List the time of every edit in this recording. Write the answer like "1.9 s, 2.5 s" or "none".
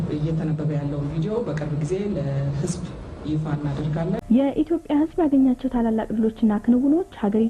4.2 s